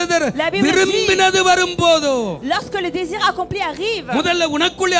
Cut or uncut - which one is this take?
uncut